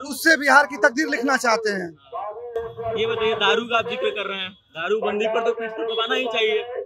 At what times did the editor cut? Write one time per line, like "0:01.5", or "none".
none